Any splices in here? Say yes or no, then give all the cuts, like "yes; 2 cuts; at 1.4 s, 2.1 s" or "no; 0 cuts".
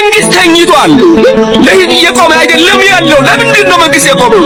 no; 0 cuts